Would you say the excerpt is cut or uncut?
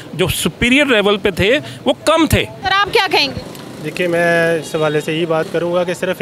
uncut